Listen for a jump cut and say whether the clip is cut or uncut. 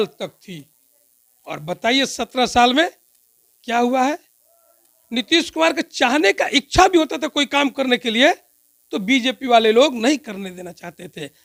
uncut